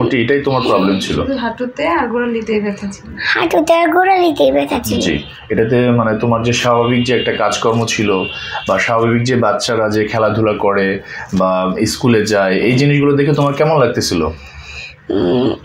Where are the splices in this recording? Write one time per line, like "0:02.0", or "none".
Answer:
none